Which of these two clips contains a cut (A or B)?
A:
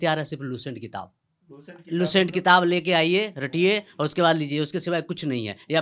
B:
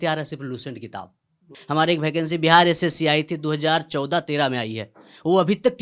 B